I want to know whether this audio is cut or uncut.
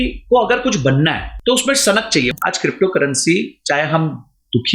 cut